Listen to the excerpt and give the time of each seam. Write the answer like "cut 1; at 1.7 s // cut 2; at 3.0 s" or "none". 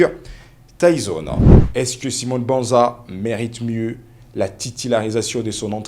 cut 1; at 1.4 s